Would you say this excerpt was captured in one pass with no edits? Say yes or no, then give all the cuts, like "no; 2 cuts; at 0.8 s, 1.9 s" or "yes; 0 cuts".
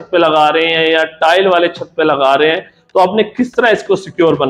yes; 0 cuts